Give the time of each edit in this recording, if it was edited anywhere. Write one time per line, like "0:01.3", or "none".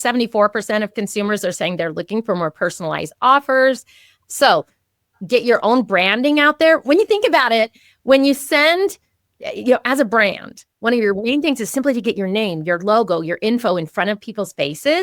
none